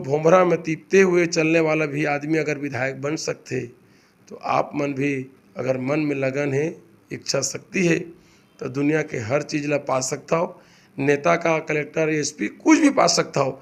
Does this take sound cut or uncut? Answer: uncut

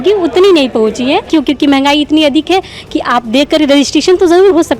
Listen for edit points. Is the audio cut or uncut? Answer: cut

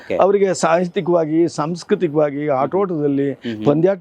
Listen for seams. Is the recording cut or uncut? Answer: uncut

